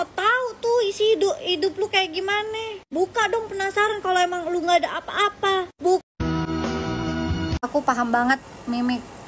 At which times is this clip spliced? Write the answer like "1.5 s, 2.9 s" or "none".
6.0 s